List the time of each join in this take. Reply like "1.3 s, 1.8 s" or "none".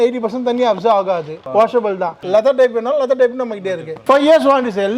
1.4 s, 2.2 s, 3.9 s